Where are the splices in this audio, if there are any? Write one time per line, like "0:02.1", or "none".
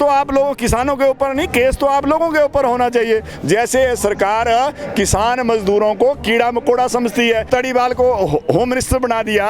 0:03.3
0:07.5